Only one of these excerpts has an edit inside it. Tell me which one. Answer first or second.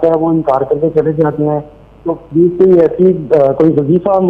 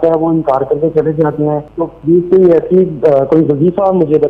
second